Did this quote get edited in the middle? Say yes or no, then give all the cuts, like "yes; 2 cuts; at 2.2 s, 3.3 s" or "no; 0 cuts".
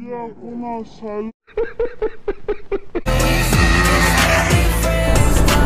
yes; 1 cut; at 3.1 s